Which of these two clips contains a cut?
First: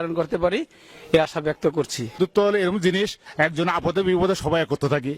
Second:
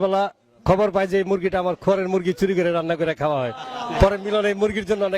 first; 2 cuts; at 2.1 s, 3.2 s

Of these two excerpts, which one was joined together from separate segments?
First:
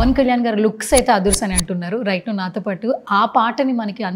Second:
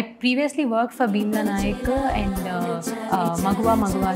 second; 1 cut; at 2.9 s

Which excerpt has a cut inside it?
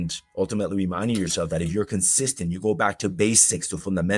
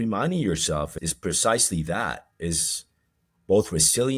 second; 1 cut; at 0.9 s

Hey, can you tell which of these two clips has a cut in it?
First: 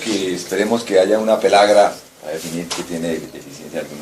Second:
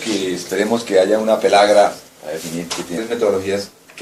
first; 1 cut; at 2.9 s

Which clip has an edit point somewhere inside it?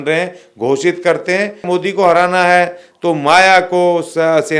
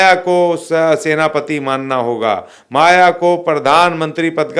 first; 1 cut; at 1.6 s

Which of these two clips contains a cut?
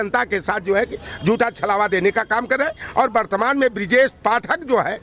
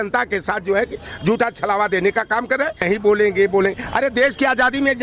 second; 1 cut; at 2.8 s

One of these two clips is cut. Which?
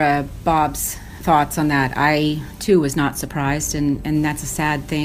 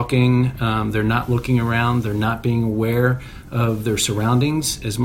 first; 1 cut; at 1.1 s

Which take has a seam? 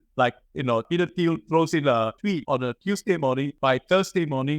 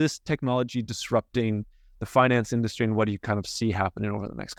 first; 3 cuts; at 0.9 s, 2.4 s, 3.5 s

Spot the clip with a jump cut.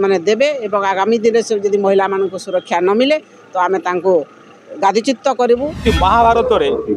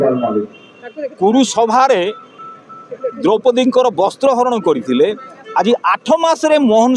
first; 1 cut; at 5.8 s

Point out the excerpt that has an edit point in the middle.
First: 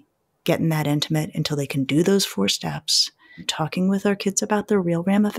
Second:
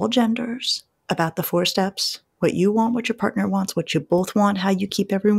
first; 1 cut; at 3.5 s

